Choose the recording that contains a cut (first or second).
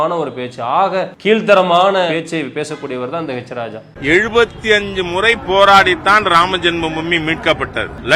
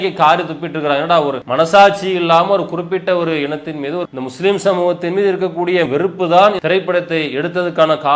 first